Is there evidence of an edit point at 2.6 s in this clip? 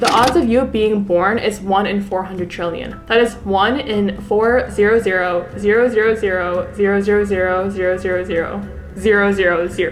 no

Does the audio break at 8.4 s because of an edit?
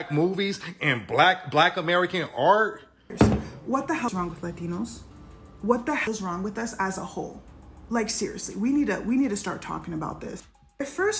no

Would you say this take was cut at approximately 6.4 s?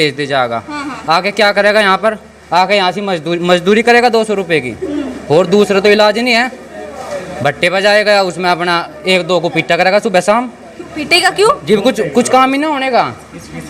no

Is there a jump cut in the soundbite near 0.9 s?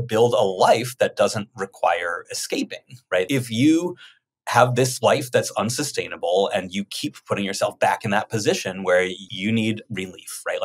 no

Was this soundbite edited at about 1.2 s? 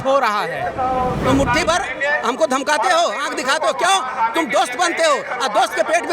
yes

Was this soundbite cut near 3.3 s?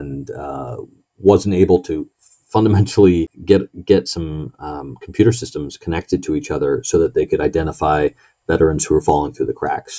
yes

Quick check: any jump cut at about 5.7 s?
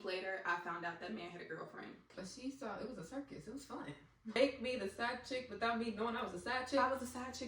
no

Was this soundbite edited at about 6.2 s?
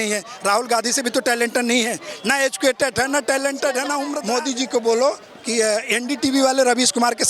no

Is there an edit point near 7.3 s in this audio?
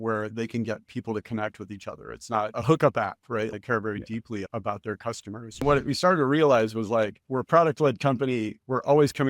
no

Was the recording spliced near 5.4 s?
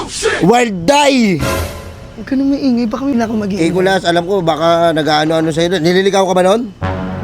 no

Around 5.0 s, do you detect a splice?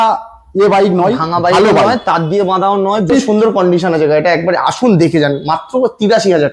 no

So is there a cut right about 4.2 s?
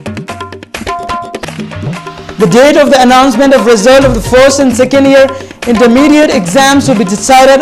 no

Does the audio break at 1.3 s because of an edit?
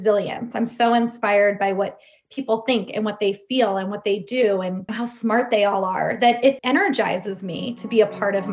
no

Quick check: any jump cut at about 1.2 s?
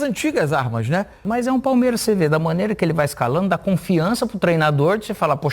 yes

